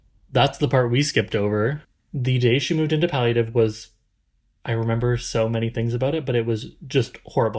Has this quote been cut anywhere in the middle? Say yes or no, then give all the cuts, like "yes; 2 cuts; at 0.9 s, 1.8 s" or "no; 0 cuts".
yes; 1 cut; at 1.8 s